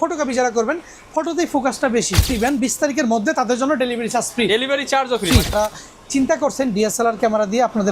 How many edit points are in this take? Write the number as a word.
two